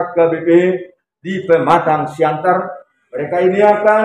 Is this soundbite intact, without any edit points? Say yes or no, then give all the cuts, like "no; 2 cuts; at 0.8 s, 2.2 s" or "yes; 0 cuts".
yes; 0 cuts